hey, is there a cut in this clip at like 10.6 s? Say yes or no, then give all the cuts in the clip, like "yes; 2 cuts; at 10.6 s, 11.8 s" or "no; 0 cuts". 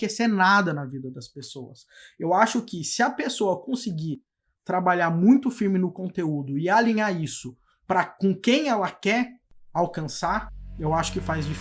yes; 1 cut; at 10.6 s